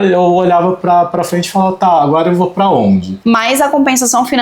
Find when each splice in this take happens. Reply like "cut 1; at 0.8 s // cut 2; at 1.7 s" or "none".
cut 1; at 3.1 s